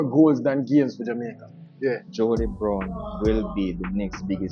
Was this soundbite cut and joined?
yes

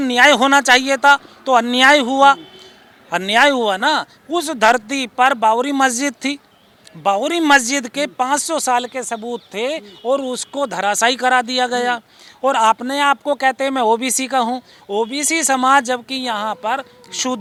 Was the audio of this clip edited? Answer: no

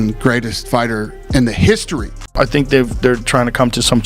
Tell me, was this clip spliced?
yes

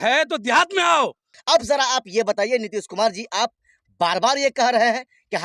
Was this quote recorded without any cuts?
no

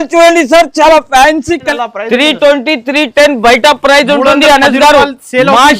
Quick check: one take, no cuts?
no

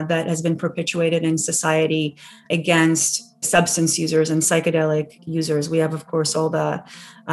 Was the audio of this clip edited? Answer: yes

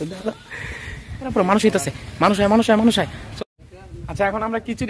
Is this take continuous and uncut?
no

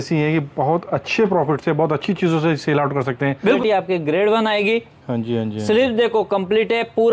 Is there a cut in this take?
yes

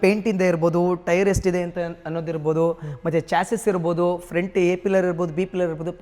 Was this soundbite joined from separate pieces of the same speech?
no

